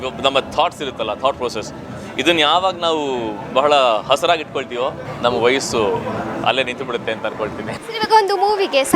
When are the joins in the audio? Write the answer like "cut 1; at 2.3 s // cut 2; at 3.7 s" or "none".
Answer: cut 1; at 5.1 s // cut 2; at 7.7 s